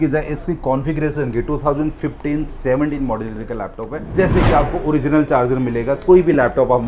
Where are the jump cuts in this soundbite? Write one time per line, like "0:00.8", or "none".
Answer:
0:03.9